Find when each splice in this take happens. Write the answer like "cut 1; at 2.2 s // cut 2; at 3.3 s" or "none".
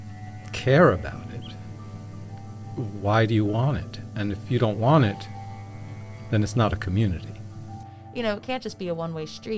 cut 1; at 7.9 s